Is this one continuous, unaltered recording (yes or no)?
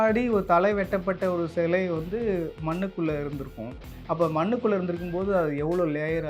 yes